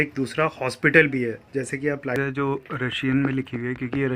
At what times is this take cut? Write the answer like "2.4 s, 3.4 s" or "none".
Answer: 2.1 s